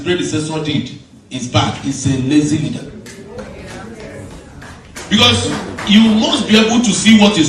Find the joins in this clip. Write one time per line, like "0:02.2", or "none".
none